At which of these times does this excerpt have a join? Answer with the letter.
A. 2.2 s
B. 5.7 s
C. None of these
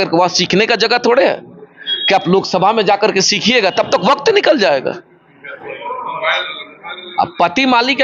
B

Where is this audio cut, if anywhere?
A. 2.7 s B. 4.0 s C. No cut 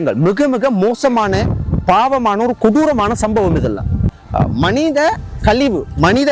C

